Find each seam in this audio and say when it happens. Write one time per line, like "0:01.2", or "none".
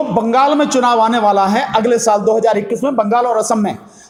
none